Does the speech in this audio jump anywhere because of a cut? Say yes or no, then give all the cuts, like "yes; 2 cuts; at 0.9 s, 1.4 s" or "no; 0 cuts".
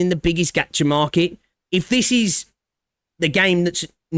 yes; 1 cut; at 1.5 s